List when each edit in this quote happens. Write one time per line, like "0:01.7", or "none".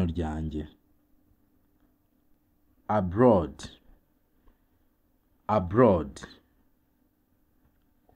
0:02.8